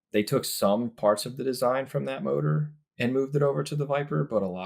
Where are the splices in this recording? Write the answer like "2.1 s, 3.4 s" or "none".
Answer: none